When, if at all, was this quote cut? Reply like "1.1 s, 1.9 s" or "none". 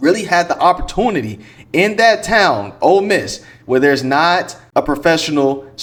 none

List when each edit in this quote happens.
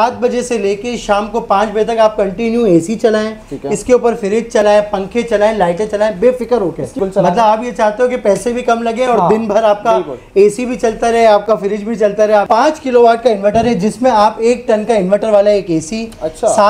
7.0 s, 12.5 s

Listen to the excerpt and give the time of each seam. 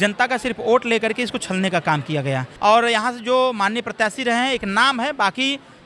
2.5 s

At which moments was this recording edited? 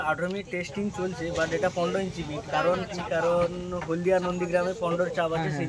none

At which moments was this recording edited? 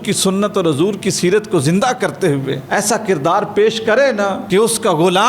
2.6 s, 4.4 s

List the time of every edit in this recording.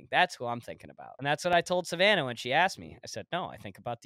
1.2 s

